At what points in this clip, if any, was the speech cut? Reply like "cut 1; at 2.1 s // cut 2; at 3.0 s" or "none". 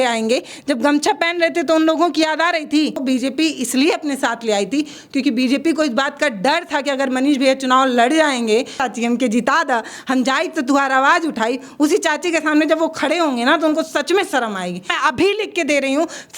cut 1; at 3.0 s // cut 2; at 8.8 s // cut 3; at 14.9 s

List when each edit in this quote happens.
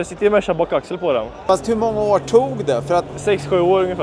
cut 1; at 1.4 s // cut 2; at 3.1 s

